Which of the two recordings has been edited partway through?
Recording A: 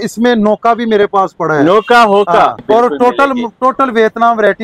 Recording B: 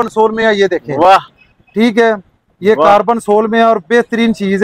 A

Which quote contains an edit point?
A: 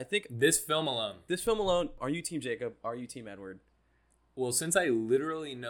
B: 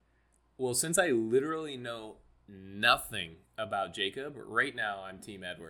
A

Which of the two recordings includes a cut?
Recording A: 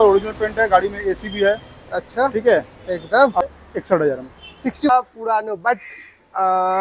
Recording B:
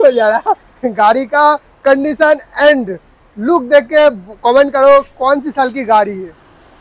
A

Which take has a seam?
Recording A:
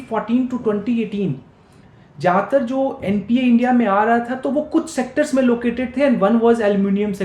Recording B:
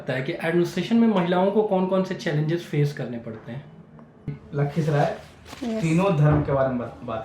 B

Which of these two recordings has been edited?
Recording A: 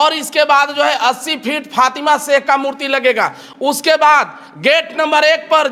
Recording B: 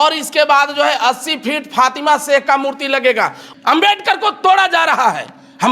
B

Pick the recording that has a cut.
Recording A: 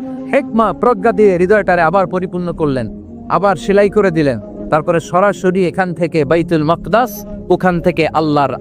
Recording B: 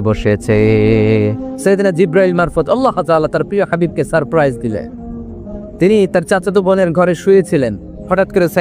B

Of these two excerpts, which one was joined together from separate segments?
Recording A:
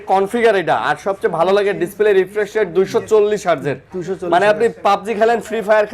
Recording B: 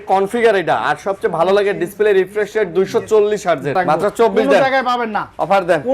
B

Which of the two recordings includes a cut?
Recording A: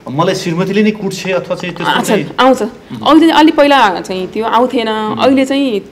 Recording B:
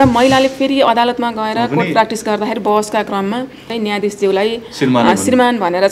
B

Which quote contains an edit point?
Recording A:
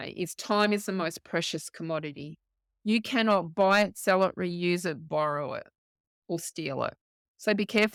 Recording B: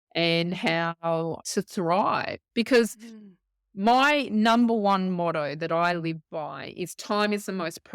B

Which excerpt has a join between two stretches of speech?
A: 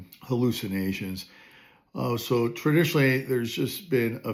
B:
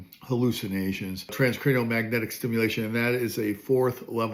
B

